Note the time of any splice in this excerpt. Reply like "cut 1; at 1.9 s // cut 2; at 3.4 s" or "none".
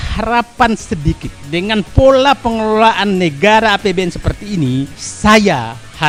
none